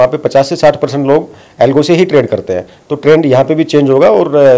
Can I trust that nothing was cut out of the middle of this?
yes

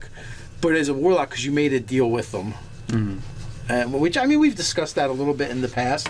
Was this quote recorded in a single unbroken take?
yes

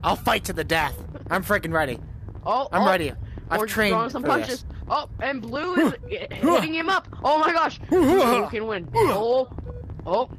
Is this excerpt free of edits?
yes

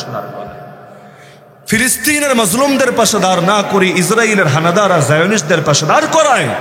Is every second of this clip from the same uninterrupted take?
yes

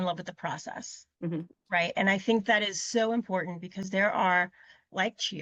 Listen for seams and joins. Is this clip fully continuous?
yes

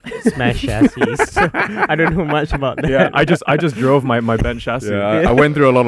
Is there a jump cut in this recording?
no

